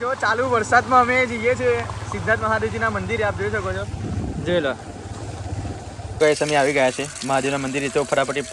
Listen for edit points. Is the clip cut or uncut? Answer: cut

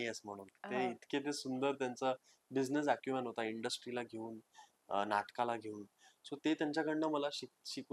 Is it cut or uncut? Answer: uncut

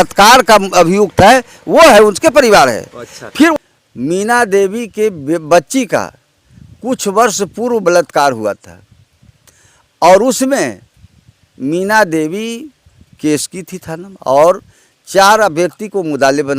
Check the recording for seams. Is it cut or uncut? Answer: cut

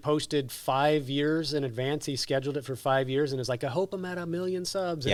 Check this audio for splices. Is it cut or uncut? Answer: uncut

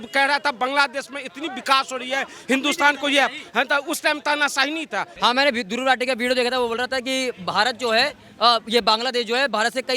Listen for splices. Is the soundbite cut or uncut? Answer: cut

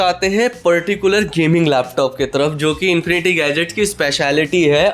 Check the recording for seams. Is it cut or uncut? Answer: uncut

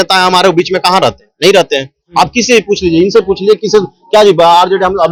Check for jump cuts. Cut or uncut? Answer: uncut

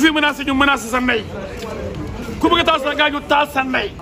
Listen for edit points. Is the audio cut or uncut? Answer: uncut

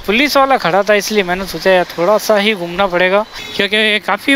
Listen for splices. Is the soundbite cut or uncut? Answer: cut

